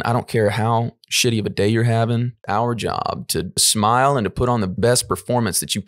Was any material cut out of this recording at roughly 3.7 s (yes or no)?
yes